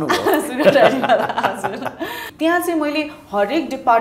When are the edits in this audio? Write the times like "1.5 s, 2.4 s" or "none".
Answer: 2.2 s